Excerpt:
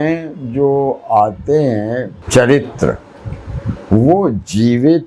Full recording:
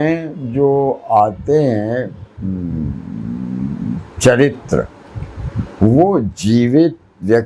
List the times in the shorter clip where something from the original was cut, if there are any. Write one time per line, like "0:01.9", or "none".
0:02.2